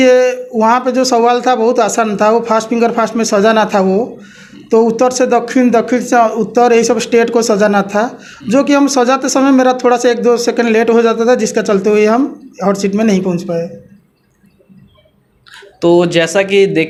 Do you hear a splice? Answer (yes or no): no